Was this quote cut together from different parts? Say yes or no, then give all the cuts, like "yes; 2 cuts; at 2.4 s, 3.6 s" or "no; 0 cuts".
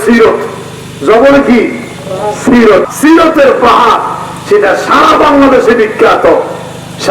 yes; 1 cut; at 2.9 s